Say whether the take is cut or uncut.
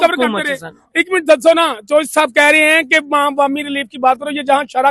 uncut